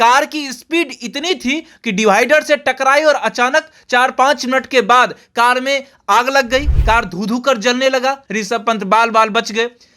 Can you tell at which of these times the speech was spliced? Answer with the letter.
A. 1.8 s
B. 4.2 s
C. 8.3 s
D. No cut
C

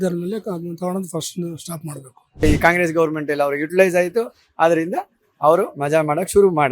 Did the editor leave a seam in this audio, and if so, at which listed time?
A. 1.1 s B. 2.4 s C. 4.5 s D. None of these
B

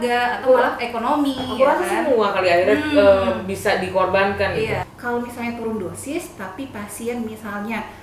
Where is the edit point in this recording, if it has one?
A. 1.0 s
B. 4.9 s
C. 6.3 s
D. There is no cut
B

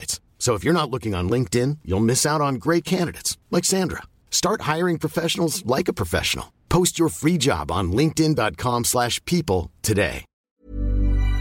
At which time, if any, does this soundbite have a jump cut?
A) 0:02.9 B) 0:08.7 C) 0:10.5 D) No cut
C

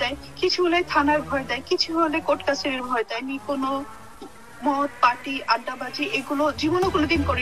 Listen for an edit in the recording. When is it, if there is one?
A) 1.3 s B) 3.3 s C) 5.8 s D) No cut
B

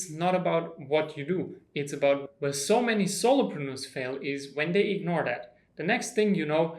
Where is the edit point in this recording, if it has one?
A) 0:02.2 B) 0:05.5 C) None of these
A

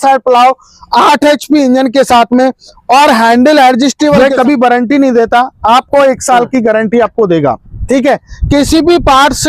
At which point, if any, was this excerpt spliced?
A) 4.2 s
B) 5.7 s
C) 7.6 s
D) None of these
A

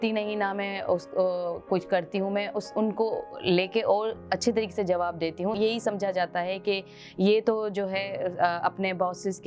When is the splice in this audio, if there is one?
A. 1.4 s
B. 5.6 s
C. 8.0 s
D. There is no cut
B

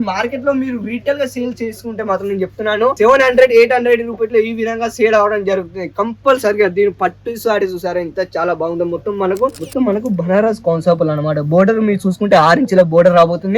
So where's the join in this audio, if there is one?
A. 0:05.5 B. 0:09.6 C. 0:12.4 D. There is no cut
B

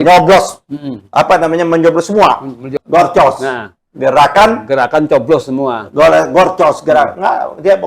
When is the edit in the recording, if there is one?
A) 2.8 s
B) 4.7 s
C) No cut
A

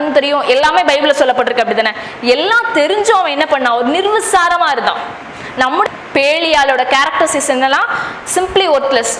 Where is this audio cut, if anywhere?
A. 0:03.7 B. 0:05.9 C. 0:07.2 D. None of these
B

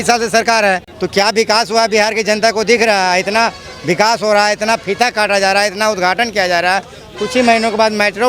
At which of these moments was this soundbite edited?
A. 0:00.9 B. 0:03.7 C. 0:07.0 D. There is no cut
A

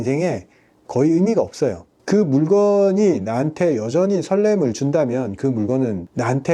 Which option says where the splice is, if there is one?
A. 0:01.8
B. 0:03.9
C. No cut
C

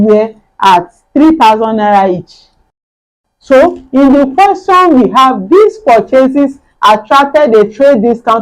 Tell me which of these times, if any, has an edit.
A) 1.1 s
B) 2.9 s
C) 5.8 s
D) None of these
B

